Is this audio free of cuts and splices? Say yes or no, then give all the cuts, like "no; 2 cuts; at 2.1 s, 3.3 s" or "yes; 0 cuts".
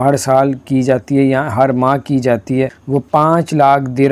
no; 1 cut; at 2.8 s